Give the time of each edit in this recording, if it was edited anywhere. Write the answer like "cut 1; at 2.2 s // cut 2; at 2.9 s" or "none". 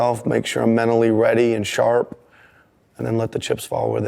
none

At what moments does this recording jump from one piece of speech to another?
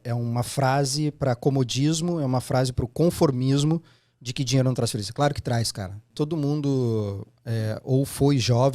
cut 1; at 6.0 s

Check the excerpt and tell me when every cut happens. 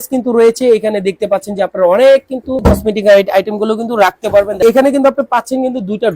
cut 1; at 2.6 s // cut 2; at 4.6 s

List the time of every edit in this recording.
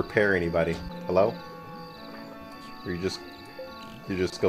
cut 1; at 0.9 s

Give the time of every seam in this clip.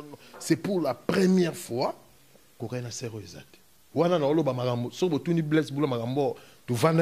cut 1; at 2.6 s

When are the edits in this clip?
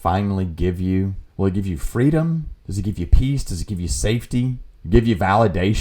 cut 1; at 1.2 s // cut 2; at 2.6 s // cut 3; at 4.7 s

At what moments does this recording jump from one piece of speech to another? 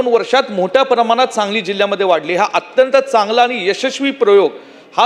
none

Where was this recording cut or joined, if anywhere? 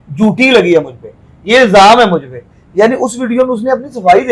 none

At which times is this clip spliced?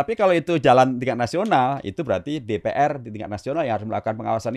none

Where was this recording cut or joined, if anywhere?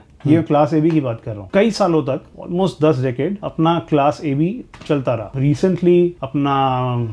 cut 1; at 1.3 s // cut 2; at 2.3 s // cut 3; at 3.4 s // cut 4; at 5.3 s // cut 5; at 6.2 s

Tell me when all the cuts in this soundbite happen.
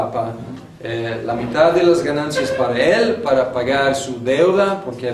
cut 1; at 3.2 s

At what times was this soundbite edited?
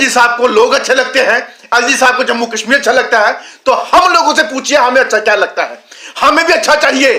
none

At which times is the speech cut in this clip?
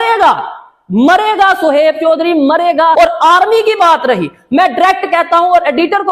cut 1; at 2.9 s

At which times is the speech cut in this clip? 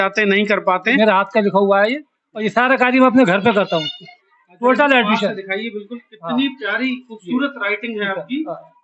cut 1; at 1.0 s

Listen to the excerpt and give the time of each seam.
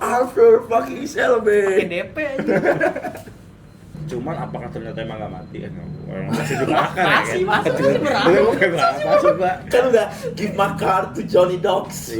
cut 1; at 3.9 s

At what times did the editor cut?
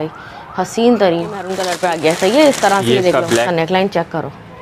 cut 1; at 1.6 s // cut 2; at 3.5 s

